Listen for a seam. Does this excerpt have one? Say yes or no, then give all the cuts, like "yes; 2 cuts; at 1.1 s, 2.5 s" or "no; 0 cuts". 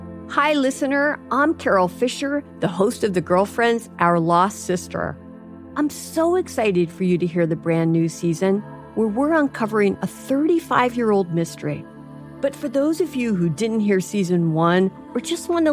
no; 0 cuts